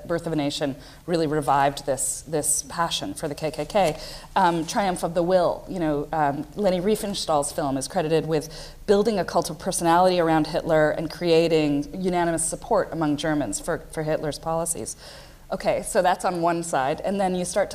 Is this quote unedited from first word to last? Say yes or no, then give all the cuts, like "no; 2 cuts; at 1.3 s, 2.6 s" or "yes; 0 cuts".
yes; 0 cuts